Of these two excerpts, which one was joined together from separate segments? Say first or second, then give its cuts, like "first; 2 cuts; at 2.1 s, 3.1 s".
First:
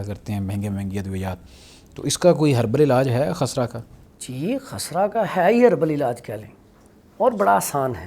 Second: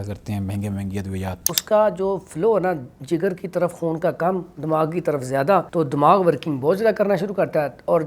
second; 2 cuts; at 1.6 s, 5.7 s